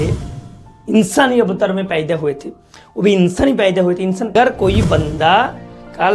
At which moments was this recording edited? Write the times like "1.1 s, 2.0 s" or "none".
4.3 s